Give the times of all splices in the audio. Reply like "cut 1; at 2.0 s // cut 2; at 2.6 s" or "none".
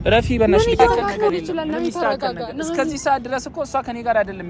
cut 1; at 1.3 s